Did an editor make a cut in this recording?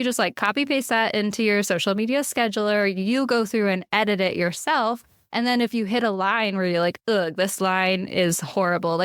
no; 0 cuts

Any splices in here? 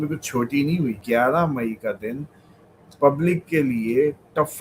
yes; 1 cut; at 1.0 s

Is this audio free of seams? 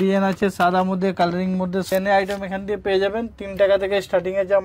no; 1 cut; at 1.9 s

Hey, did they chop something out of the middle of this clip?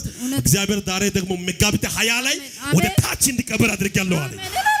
no; 0 cuts

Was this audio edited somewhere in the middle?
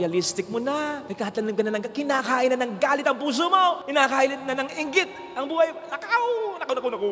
no; 0 cuts

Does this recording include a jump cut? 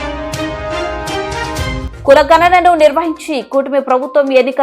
yes; 1 cut; at 1.4 s

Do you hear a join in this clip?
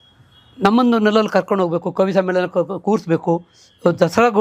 no; 0 cuts

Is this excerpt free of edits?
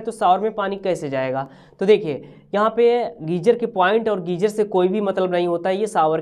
yes; 0 cuts

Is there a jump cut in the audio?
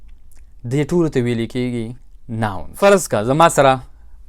yes; 1 cut; at 2.6 s

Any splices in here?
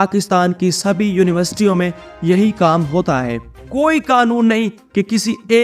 yes; 1 cut; at 3.6 s

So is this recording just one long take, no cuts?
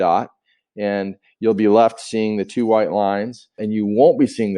no; 1 cut; at 3.5 s

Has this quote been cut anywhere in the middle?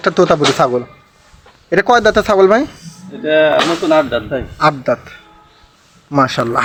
no; 0 cuts

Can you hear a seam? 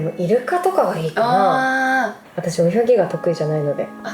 yes; 1 cut; at 2.2 s

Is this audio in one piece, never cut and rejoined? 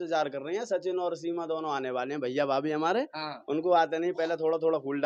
yes; 0 cuts

